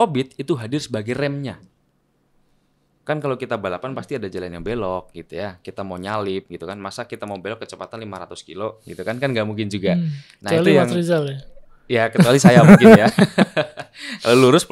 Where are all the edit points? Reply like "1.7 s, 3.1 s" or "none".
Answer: none